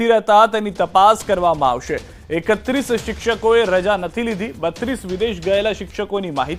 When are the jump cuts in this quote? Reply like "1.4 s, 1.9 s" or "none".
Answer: none